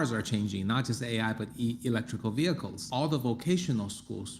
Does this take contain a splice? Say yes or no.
yes